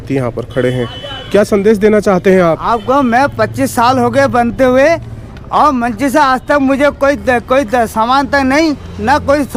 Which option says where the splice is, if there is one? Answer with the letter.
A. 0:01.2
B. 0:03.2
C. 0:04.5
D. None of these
D